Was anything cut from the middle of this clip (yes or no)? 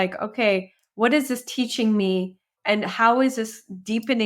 yes